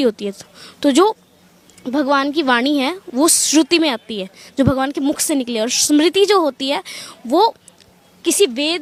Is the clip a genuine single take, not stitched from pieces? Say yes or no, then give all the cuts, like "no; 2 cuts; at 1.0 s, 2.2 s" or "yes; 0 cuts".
yes; 0 cuts